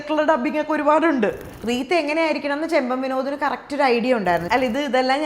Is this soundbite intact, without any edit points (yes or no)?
no